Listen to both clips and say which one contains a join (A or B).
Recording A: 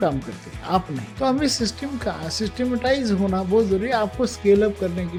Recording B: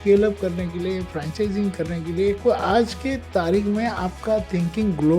B